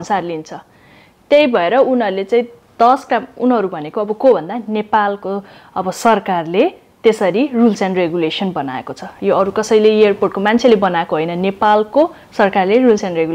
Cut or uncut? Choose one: uncut